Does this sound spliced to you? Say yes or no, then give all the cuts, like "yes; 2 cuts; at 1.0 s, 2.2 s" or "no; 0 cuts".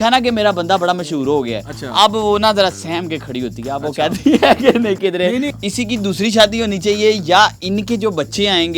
yes; 1 cut; at 5.5 s